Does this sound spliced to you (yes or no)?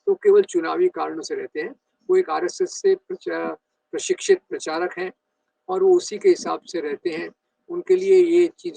no